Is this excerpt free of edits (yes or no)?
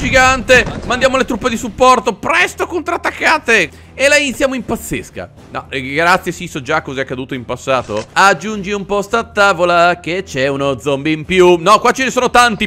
no